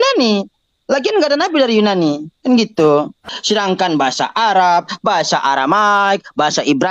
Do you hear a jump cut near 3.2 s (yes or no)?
yes